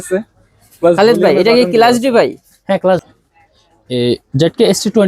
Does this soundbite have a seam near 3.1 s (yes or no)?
yes